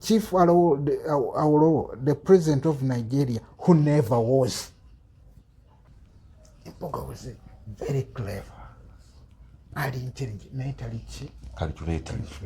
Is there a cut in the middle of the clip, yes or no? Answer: yes